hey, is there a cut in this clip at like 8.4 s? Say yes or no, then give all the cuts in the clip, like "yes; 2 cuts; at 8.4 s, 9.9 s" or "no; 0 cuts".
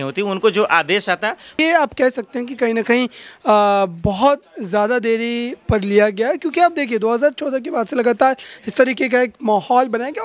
no; 1 cut; at 1.6 s